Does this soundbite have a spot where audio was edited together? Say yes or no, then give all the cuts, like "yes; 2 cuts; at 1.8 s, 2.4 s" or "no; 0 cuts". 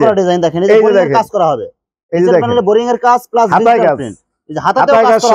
no; 0 cuts